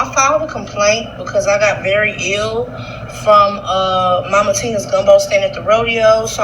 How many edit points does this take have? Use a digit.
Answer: 0